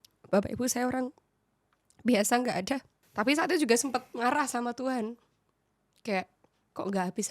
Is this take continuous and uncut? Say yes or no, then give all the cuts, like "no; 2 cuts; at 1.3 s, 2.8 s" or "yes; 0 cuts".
no; 1 cut; at 3.0 s